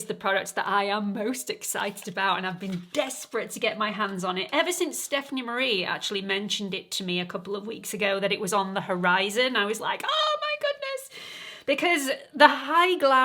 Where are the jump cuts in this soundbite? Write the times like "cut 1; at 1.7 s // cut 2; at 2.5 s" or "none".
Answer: none